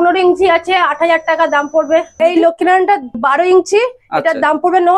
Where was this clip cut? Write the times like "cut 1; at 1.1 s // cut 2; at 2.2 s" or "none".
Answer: cut 1; at 2.1 s // cut 2; at 3.2 s